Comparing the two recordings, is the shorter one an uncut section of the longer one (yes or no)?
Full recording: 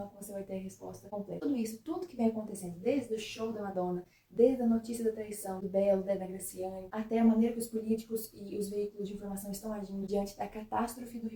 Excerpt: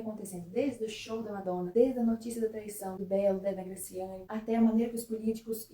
no